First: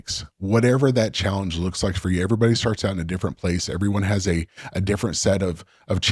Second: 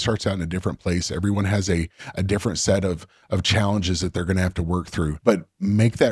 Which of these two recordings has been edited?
second; 1 cut; at 5.2 s

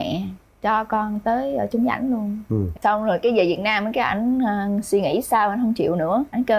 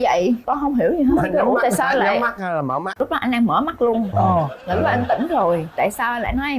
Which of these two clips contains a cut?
first; 1 cut; at 2.8 s

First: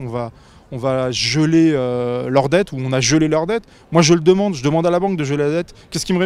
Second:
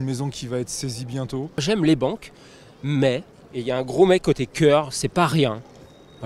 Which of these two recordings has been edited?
second; 1 cut; at 1.6 s

